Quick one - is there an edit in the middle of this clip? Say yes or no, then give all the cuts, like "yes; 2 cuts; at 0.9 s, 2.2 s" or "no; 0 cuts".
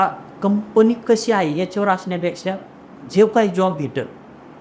no; 0 cuts